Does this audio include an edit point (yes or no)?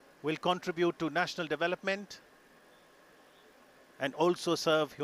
no